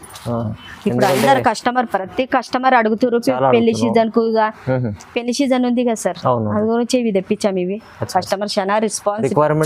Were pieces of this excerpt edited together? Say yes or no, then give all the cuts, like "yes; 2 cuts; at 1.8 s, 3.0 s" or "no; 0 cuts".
no; 0 cuts